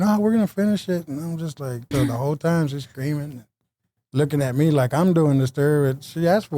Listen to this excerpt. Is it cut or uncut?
cut